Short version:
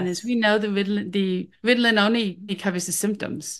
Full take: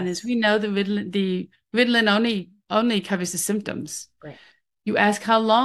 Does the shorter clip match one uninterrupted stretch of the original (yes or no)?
no